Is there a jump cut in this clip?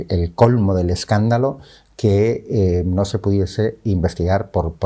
no; 0 cuts

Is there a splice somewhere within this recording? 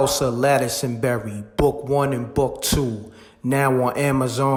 no; 0 cuts

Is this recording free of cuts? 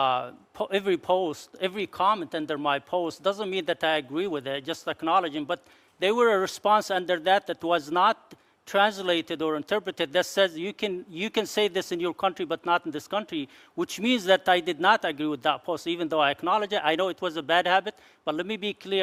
yes; 0 cuts

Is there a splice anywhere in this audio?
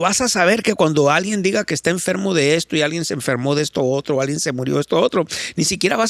no; 0 cuts

